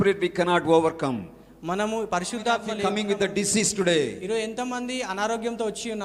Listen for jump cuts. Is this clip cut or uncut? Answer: cut